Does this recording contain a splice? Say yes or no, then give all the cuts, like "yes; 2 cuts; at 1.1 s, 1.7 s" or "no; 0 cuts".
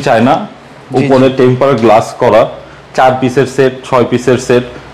no; 0 cuts